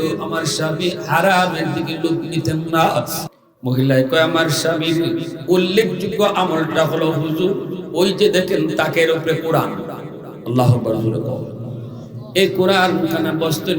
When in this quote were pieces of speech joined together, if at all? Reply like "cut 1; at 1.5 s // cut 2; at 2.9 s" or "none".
cut 1; at 3.2 s